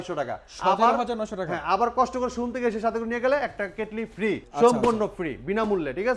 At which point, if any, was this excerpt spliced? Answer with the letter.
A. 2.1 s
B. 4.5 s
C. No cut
B